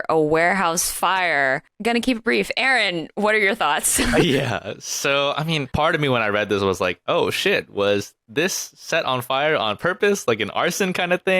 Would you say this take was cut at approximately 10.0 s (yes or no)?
no